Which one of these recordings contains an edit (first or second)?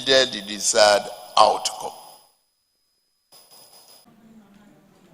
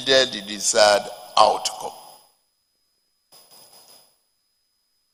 first